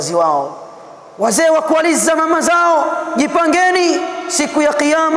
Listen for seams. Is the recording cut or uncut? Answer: uncut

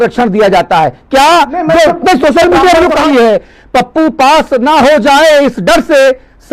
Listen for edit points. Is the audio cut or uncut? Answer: cut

